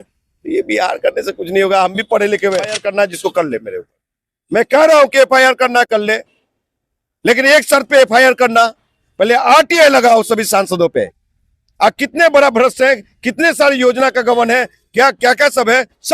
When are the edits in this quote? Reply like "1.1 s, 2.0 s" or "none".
2.8 s